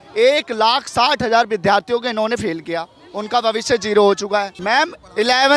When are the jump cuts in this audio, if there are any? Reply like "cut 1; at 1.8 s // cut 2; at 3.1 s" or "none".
cut 1; at 4.5 s